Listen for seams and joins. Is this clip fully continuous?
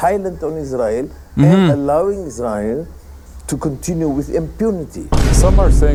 yes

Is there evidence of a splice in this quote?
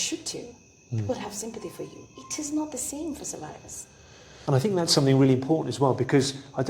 yes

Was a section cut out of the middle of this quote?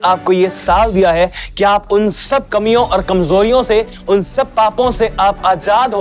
no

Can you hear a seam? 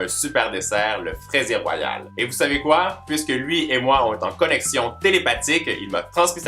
yes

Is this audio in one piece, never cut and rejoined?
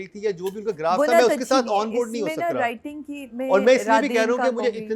yes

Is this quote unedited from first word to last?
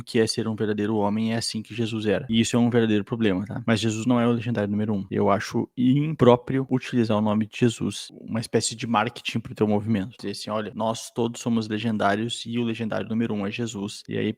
yes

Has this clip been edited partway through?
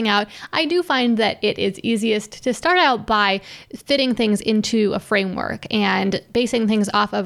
no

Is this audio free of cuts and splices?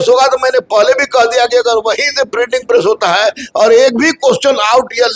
yes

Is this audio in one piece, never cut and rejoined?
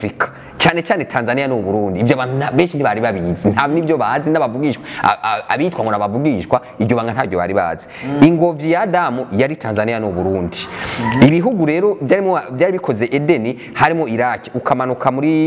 yes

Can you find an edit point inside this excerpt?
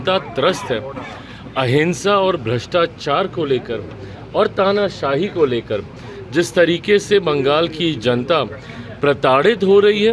no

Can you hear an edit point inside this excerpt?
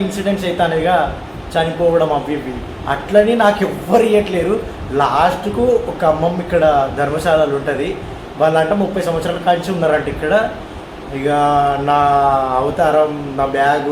no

